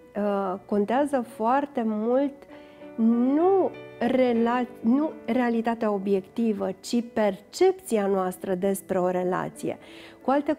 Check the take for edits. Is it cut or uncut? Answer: uncut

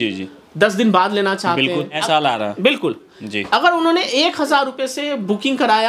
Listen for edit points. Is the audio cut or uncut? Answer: cut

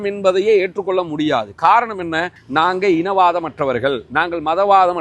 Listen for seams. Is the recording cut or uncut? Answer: cut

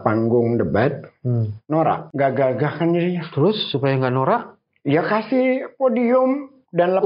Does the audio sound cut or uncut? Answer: cut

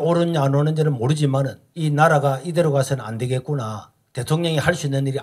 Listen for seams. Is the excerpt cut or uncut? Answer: uncut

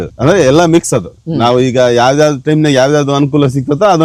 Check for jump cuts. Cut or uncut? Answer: uncut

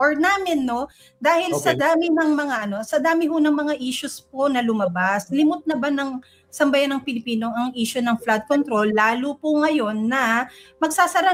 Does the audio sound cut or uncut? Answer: uncut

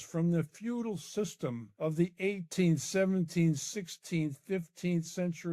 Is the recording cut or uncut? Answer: cut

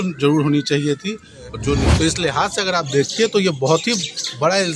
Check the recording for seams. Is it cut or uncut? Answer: cut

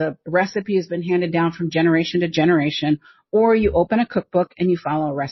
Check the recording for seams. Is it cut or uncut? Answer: uncut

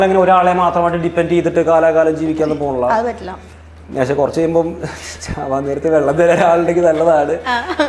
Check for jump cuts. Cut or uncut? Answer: uncut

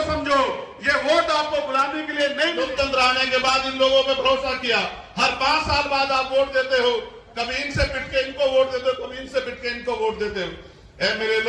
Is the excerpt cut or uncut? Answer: cut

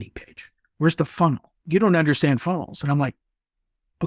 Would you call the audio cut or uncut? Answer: cut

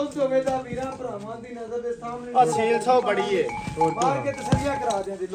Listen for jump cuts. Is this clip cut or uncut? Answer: uncut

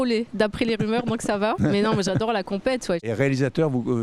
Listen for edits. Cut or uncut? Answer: cut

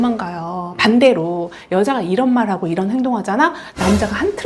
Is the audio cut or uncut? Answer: uncut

